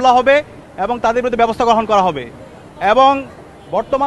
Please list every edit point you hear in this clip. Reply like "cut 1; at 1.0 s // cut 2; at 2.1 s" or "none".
none